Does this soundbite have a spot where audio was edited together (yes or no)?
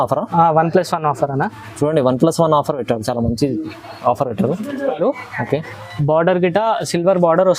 yes